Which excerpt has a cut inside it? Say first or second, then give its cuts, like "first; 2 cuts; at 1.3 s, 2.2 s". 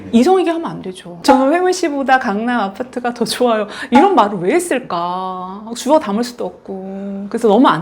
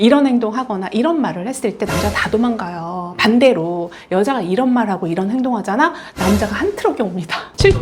first; 1 cut; at 1.1 s